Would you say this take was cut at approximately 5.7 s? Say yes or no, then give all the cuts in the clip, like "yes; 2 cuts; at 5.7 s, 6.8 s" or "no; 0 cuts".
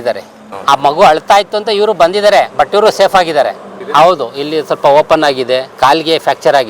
yes; 1 cut; at 5.7 s